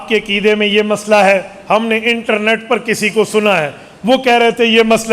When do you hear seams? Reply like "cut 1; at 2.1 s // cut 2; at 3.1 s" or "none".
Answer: none